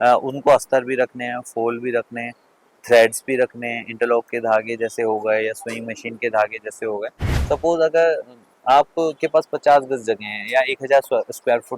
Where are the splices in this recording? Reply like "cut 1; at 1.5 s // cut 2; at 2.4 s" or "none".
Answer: cut 1; at 7.3 s